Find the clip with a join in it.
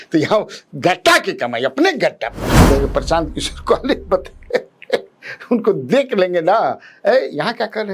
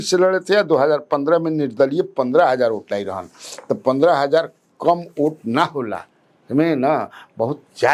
first; 1 cut; at 2.5 s

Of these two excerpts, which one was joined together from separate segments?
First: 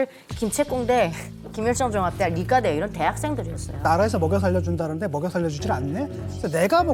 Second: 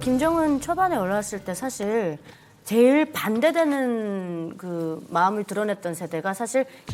first; 1 cut; at 3.8 s

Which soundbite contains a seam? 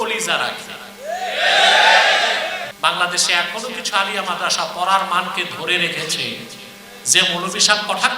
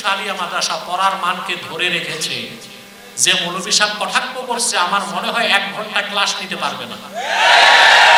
first; 1 cut; at 2.7 s

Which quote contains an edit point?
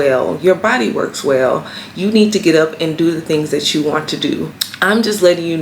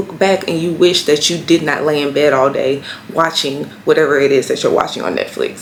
first; 1 cut; at 4.6 s

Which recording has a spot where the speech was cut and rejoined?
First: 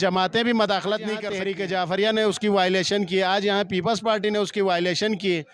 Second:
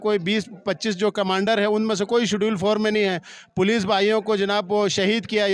first; 1 cut; at 1.3 s

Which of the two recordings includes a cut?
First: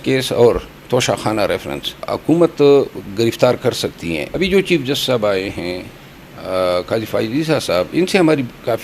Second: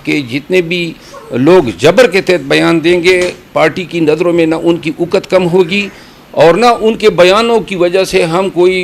first; 2 cuts; at 2.0 s, 4.2 s

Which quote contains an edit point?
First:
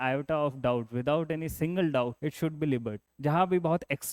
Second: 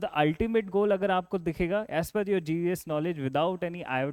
first; 2 cuts; at 2.2 s, 3.0 s

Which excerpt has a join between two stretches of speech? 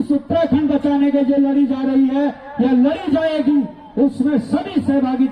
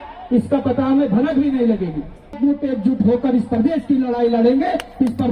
second; 1 cut; at 2.4 s

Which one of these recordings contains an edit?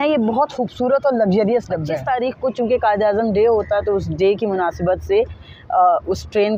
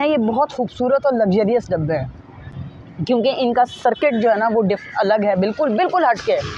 first; 1 cut; at 1.9 s

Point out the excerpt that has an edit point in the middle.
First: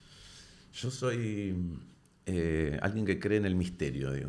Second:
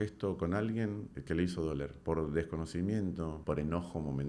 second; 3 cuts; at 1.1 s, 2.0 s, 3.4 s

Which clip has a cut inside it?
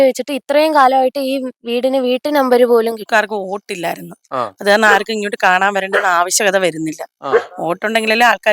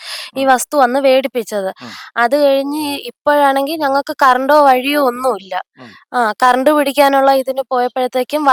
first; 1 cut; at 3.0 s

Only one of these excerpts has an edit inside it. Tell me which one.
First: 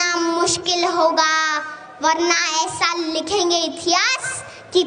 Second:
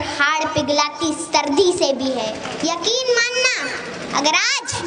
second; 1 cut; at 2.5 s

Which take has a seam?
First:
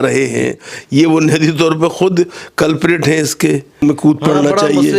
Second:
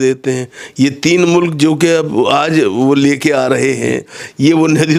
first; 1 cut; at 3.8 s

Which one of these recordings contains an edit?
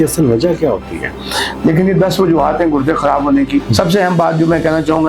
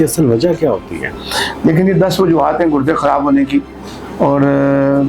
first; 1 cut; at 3.7 s

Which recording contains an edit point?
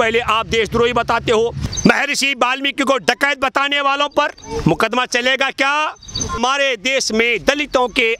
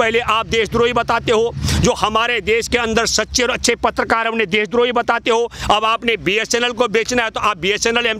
first; 2 cuts; at 1.6 s, 6.4 s

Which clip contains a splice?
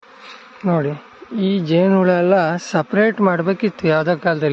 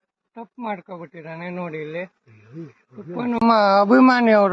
second; 1 cut; at 3.4 s

